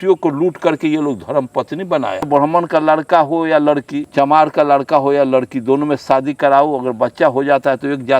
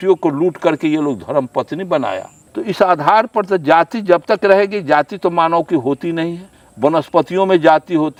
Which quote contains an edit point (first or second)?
first